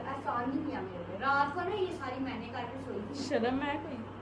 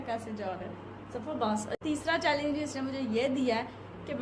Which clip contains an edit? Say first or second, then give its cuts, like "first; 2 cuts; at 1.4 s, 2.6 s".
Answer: second; 1 cut; at 1.7 s